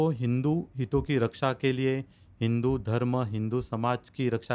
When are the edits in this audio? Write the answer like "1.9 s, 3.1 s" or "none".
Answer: none